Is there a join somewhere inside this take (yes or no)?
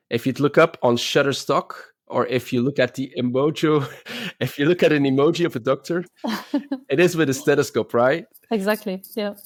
no